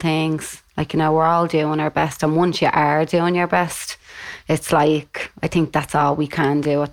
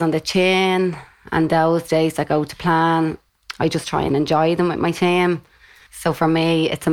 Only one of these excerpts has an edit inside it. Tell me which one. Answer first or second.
second